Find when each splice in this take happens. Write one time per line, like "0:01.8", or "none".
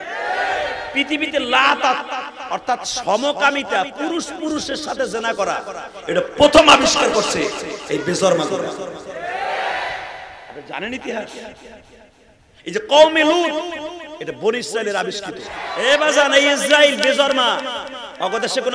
0:15.7